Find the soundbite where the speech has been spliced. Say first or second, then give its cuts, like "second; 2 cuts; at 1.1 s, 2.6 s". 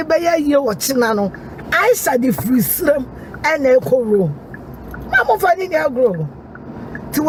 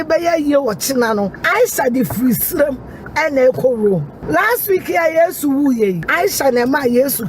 second; 3 cuts; at 1.4 s, 4.1 s, 6.1 s